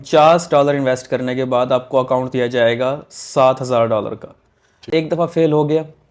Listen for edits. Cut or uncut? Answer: cut